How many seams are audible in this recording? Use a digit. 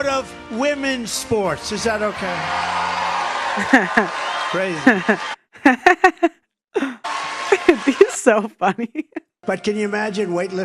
1